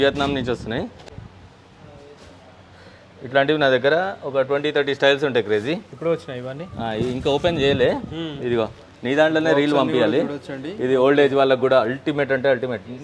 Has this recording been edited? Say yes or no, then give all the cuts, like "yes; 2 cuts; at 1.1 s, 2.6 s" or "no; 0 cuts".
no; 0 cuts